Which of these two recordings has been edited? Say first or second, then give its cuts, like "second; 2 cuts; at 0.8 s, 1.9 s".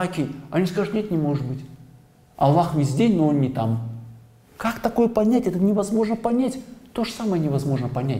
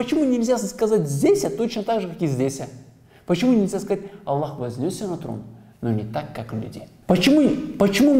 second; 1 cut; at 6.9 s